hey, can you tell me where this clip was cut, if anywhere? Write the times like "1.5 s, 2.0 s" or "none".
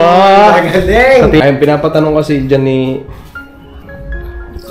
1.4 s